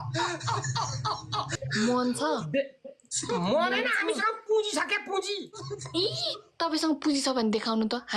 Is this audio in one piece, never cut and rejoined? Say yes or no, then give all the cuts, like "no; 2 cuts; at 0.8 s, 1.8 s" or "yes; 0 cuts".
no; 1 cut; at 1.6 s